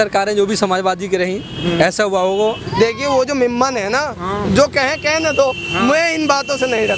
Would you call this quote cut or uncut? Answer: cut